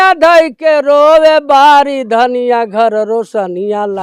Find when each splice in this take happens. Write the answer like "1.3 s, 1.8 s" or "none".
none